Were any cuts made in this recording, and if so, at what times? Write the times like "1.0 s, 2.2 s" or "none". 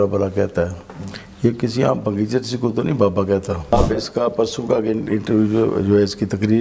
3.7 s